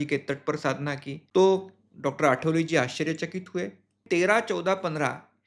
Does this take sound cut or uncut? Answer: cut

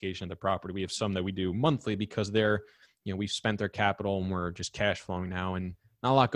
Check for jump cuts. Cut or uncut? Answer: uncut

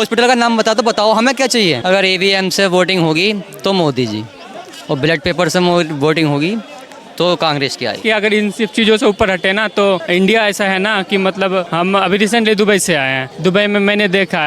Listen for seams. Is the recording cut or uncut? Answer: cut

